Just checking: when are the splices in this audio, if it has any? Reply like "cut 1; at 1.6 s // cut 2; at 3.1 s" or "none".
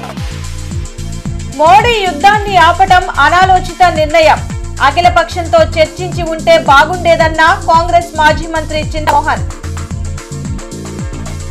none